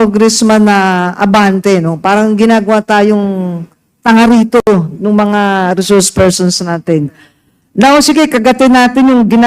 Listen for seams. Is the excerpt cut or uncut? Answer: uncut